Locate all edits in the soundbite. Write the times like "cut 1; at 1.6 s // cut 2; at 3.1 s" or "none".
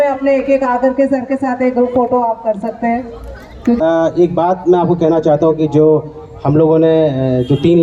cut 1; at 3.8 s